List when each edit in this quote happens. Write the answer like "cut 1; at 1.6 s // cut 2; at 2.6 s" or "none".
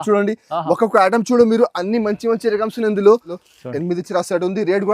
cut 1; at 3.4 s

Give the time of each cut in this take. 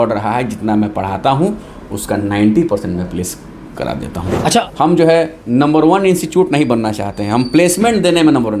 cut 1; at 4.6 s

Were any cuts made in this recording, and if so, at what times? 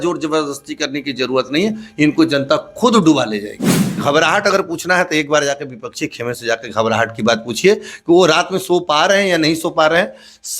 cut 1; at 4.0 s

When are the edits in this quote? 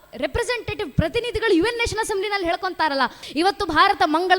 cut 1; at 3.2 s

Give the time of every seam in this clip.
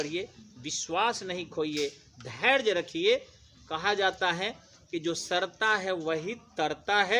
none

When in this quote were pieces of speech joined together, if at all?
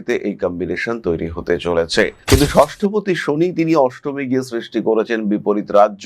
cut 1; at 2.2 s

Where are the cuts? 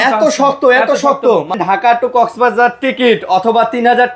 cut 1; at 1.5 s

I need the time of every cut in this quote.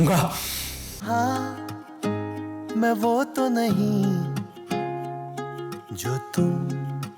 cut 1; at 0.9 s

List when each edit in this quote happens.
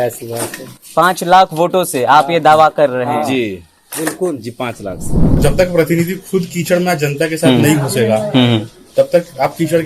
cut 1; at 5.4 s

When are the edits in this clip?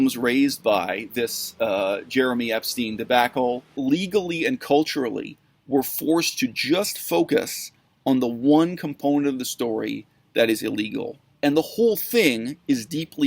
cut 1; at 3.8 s // cut 2; at 11.2 s

